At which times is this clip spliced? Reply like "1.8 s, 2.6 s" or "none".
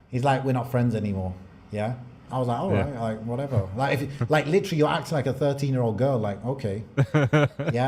2.3 s

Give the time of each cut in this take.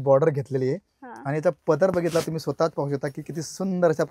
none

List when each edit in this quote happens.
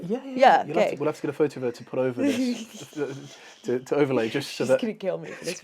none

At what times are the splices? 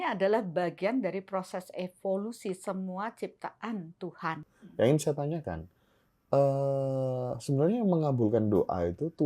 4.6 s

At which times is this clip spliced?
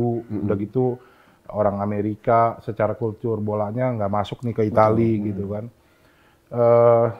none

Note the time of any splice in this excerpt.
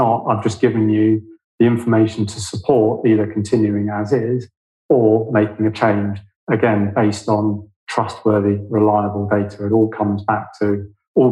none

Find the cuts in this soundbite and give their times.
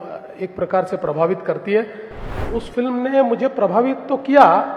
2.4 s

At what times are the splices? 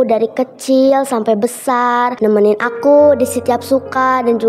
2.1 s

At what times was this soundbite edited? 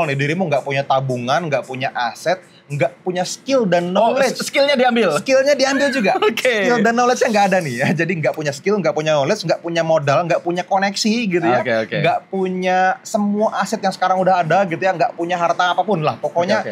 none

